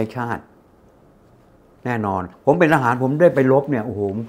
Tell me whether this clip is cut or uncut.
cut